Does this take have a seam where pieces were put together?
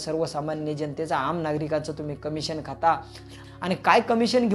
yes; 1 cut; at 3.4 s

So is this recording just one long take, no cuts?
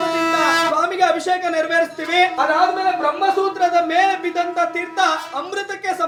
yes; 0 cuts

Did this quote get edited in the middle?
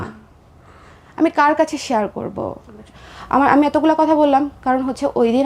yes; 1 cut; at 3.0 s

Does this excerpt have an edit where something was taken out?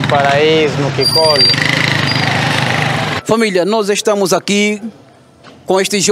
yes; 1 cut; at 3.1 s

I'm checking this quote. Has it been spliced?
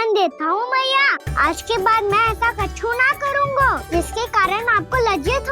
yes; 2 cuts; at 1.2 s, 3.8 s

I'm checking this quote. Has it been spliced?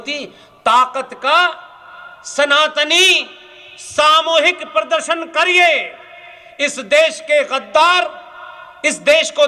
no; 0 cuts

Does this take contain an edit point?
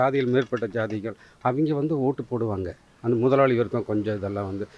no; 0 cuts

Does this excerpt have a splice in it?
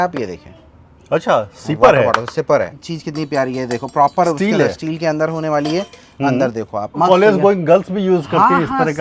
yes; 2 cuts; at 2.7 s, 7.0 s

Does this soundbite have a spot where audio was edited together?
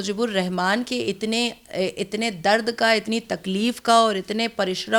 no; 0 cuts

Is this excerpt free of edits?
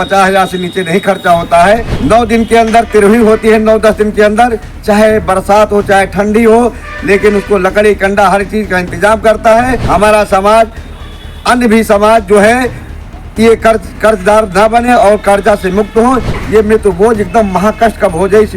no; 3 cuts; at 1.9 s, 9.8 s, 16.3 s

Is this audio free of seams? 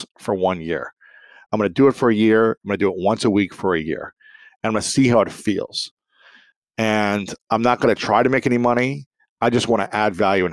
yes; 0 cuts

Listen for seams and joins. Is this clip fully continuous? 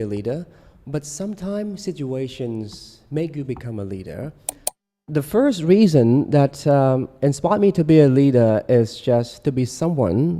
no; 1 cut; at 4.9 s

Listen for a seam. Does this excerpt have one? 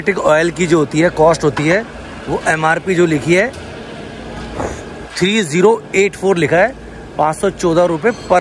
no; 0 cuts

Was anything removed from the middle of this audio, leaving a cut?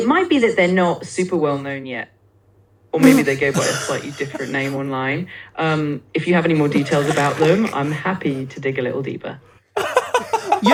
no; 0 cuts

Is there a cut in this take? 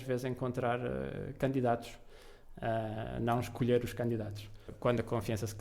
yes; 1 cut; at 4.6 s

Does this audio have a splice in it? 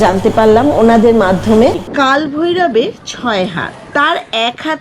yes; 1 cut; at 1.8 s

